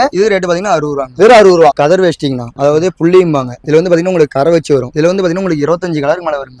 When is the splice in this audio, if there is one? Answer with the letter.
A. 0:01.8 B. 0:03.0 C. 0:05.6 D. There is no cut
A